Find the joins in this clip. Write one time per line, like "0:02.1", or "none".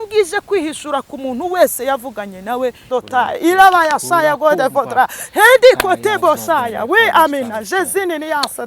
0:02.9